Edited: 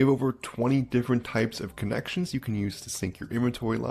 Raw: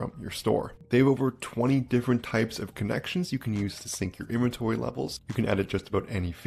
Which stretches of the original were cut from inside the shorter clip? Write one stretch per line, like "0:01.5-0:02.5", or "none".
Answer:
none